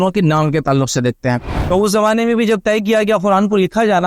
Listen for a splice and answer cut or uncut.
cut